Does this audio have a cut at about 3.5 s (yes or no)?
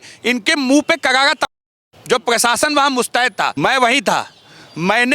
yes